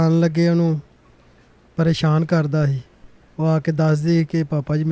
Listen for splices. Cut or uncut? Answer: uncut